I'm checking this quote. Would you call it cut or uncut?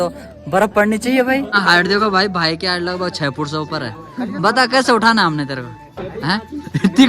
cut